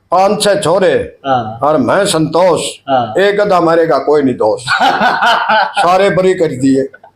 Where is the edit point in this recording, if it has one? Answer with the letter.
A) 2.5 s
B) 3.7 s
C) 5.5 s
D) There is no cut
D